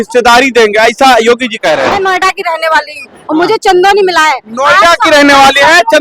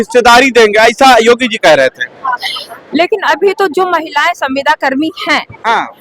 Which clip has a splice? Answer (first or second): first